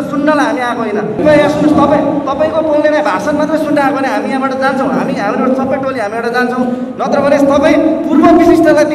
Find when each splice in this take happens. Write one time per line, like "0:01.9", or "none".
0:01.2